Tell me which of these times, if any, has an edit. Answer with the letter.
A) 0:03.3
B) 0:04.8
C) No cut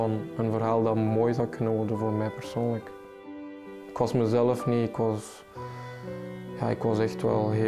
A